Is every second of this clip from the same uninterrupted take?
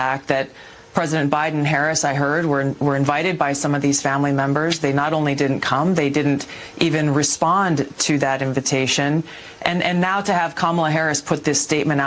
yes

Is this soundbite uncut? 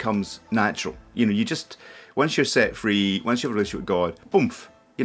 yes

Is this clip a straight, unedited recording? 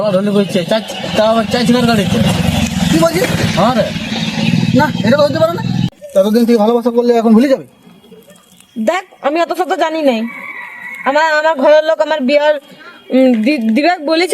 no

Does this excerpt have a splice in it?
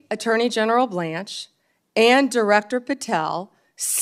no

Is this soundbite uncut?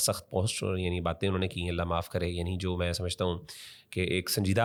yes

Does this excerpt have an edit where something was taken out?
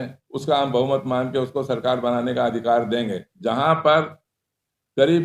yes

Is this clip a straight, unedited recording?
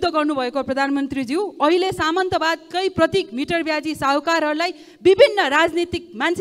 yes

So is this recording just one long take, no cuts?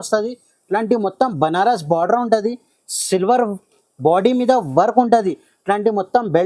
yes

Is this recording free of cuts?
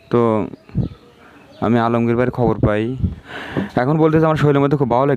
no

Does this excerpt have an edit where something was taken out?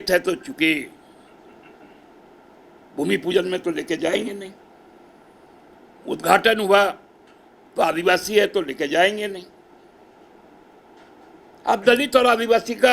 yes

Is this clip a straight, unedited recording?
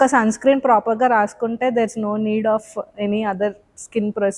yes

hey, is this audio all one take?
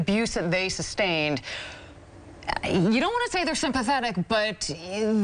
yes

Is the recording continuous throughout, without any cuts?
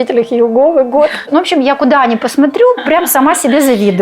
no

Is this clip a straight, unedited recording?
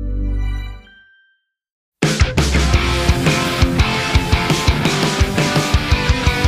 no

